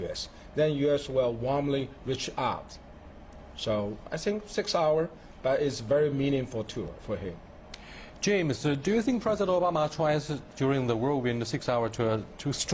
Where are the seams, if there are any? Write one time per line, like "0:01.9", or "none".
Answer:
0:08.7